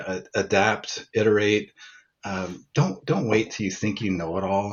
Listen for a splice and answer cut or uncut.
uncut